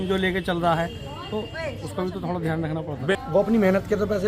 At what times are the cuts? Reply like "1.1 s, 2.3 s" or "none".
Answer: 3.0 s